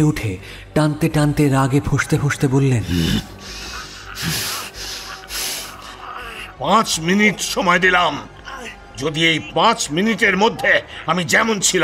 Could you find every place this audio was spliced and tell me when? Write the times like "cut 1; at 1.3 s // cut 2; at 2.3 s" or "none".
cut 1; at 2.8 s